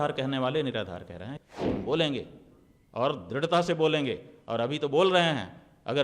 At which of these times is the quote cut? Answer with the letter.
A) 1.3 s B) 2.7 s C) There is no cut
A